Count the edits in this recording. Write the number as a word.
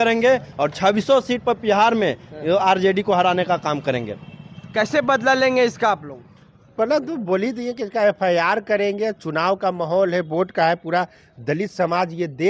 zero